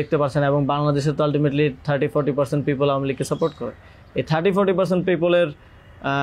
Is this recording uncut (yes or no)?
yes